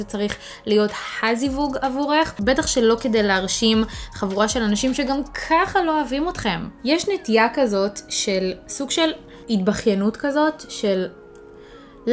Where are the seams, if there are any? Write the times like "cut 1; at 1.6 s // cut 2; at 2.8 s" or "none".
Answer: cut 1; at 2.3 s // cut 2; at 6.6 s